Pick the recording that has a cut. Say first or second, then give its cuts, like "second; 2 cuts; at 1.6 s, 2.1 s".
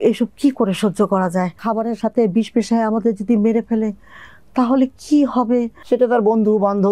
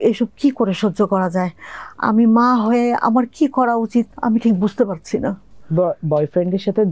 first; 2 cuts; at 1.6 s, 5.8 s